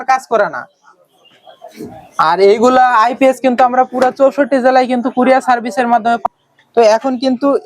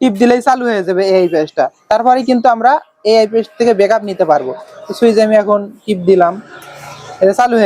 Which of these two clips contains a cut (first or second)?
first